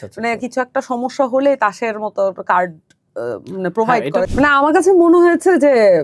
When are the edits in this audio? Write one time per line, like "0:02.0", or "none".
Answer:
0:04.3

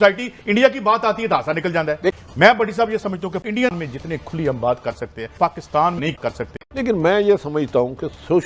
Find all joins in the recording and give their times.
0:02.2

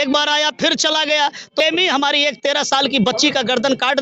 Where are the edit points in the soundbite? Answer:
0:01.6

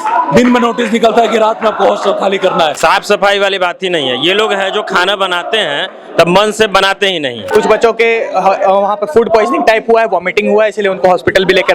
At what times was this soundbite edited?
0:02.8
0:07.5

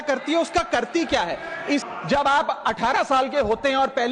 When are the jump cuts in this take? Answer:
0:01.8

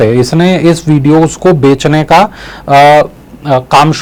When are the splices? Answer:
none

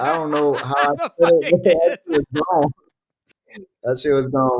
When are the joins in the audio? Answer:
none

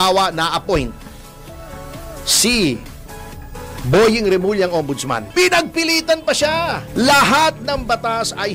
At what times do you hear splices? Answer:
0:05.2
0:06.8

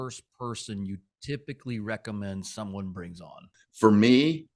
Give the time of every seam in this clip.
0:03.6

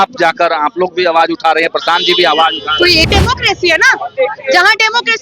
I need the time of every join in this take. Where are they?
0:03.0

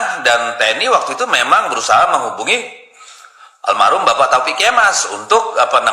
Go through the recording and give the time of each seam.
none

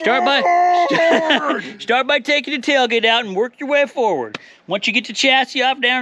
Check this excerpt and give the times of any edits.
none

